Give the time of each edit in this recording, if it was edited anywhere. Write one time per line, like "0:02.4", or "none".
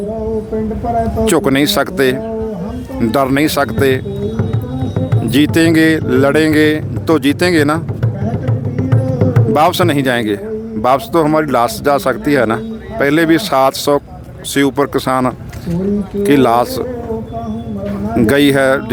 none